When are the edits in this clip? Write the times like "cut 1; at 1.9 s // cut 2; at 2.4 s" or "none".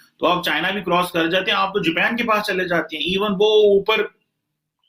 none